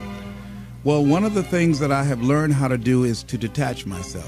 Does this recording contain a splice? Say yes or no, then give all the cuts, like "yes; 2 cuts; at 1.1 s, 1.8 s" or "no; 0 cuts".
yes; 1 cut; at 1.6 s